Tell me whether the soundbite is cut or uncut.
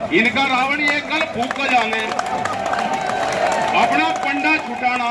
uncut